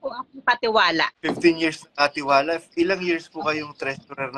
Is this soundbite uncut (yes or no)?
yes